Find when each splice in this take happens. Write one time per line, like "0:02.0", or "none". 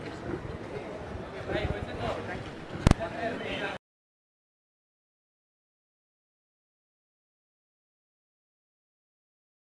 none